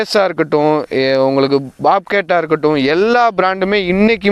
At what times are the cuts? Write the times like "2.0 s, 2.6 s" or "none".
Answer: none